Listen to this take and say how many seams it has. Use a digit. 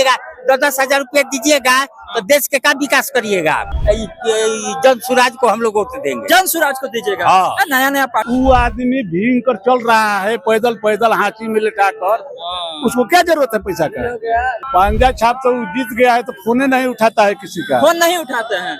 3